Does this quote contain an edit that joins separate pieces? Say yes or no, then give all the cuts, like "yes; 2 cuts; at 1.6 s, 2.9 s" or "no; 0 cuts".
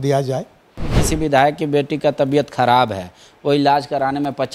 yes; 1 cut; at 0.9 s